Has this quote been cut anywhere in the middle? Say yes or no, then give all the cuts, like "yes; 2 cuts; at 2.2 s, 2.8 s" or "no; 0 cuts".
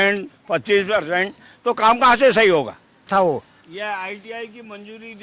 yes; 1 cut; at 3.0 s